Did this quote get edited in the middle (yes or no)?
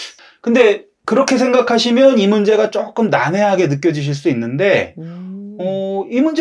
no